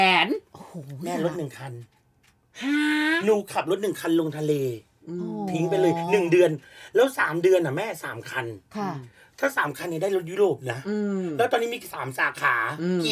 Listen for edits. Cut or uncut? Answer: uncut